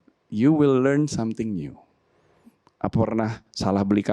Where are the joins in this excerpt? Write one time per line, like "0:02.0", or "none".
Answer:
0:02.4